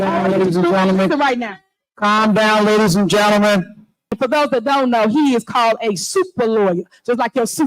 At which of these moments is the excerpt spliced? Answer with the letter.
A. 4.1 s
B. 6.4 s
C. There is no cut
A